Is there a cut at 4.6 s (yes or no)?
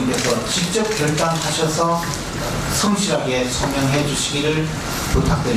no